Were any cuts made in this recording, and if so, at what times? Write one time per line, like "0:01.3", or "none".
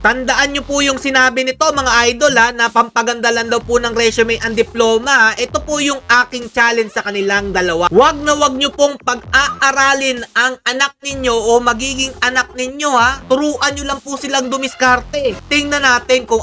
0:07.9
0:13.2
0:15.4